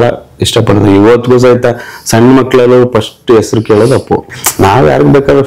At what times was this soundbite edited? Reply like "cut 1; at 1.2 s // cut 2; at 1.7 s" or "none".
cut 1; at 4.3 s